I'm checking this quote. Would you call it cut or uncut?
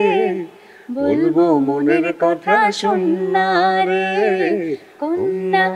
uncut